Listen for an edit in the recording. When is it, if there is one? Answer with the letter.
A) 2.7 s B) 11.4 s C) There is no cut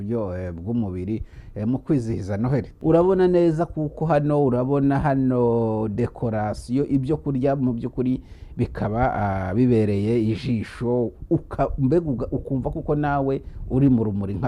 A